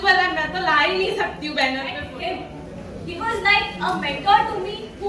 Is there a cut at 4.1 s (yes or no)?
no